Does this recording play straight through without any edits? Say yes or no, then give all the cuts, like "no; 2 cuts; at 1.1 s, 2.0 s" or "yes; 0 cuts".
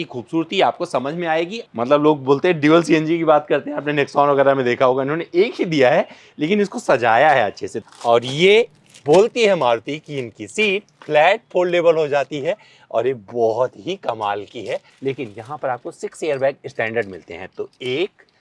no; 3 cuts; at 1.6 s, 7.8 s, 14.9 s